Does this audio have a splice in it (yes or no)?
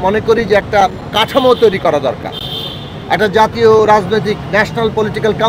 no